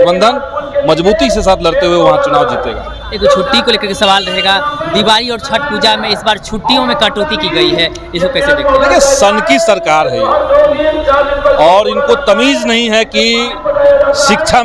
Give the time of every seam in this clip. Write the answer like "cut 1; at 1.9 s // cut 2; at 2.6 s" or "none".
none